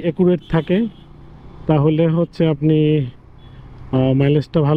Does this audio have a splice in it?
no; 0 cuts

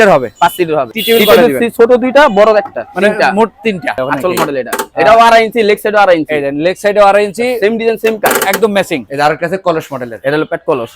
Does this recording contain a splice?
yes; 3 cuts; at 0.9 s, 4.0 s, 9.1 s

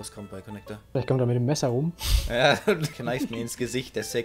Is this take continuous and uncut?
yes; 0 cuts

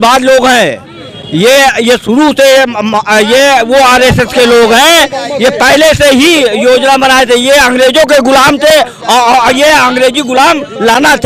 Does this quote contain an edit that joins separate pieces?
no; 0 cuts

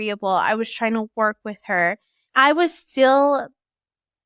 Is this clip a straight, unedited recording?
no; 1 cut; at 2.1 s

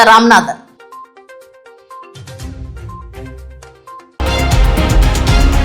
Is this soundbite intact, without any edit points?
no; 1 cut; at 4.1 s

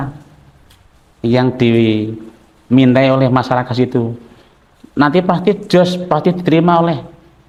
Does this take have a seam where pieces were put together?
no; 0 cuts

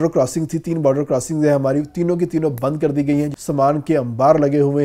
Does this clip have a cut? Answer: yes; 1 cut; at 3.4 s

